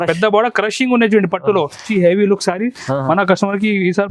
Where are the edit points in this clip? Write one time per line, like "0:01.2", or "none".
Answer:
0:01.9